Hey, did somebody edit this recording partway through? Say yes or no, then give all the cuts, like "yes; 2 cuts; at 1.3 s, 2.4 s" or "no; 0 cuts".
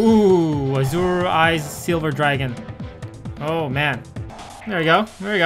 yes; 1 cut; at 4.4 s